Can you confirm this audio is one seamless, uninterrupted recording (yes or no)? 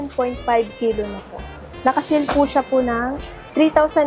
yes